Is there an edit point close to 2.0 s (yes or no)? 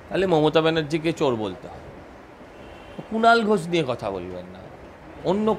no